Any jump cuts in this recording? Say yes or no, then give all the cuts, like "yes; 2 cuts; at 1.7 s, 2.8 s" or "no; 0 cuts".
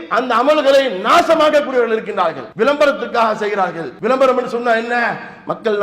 yes; 2 cuts; at 2.4 s, 3.9 s